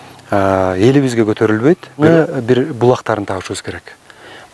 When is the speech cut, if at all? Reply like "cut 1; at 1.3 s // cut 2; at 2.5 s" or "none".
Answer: cut 1; at 2.0 s